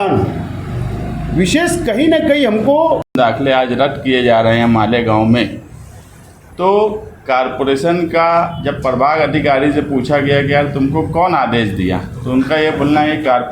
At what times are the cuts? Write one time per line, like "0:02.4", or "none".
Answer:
0:03.2